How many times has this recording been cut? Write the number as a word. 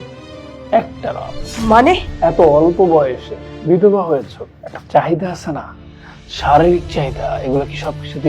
two